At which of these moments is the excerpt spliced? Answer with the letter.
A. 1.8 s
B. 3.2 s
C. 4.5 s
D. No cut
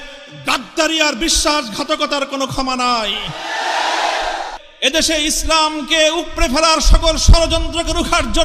C